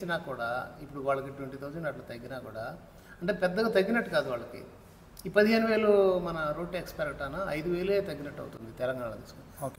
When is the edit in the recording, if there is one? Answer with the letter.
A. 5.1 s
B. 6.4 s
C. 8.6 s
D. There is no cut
D